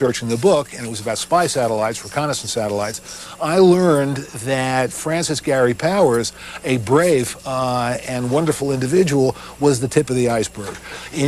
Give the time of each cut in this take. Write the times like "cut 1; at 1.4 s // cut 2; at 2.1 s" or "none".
cut 1; at 10.3 s